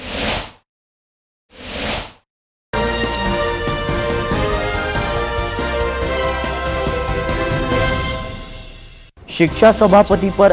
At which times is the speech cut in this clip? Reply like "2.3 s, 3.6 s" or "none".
1.1 s